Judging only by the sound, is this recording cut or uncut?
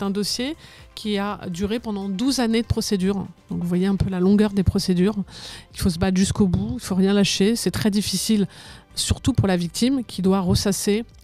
uncut